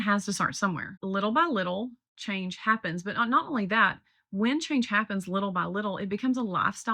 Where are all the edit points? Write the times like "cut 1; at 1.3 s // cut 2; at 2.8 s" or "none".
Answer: cut 1; at 0.9 s